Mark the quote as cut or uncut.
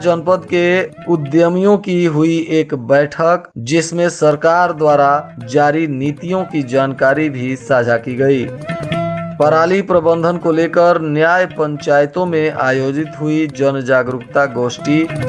uncut